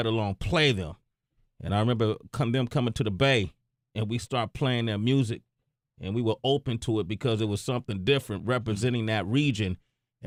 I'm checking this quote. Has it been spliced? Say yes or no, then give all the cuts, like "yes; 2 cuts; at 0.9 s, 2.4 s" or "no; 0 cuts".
no; 0 cuts